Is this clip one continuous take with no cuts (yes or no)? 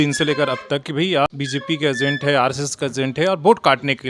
no